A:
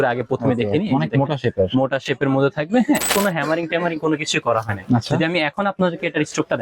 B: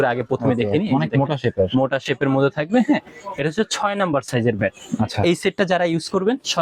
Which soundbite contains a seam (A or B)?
A